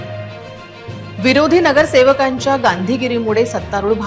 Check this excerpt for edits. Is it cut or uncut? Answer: cut